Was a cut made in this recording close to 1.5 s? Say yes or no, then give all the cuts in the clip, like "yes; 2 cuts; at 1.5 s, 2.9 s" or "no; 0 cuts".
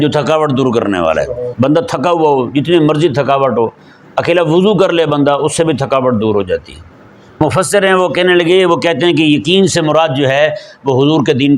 yes; 2 cuts; at 1.5 s, 7.4 s